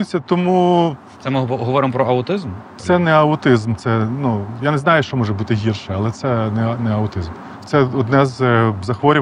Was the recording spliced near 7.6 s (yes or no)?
yes